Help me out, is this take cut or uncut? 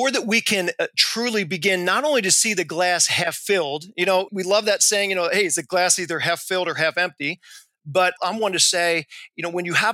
cut